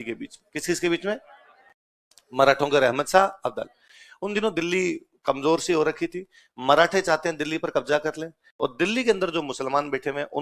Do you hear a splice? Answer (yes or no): no